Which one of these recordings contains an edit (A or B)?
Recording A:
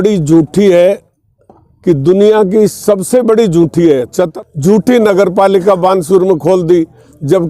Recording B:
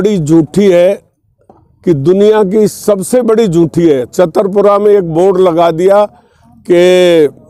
A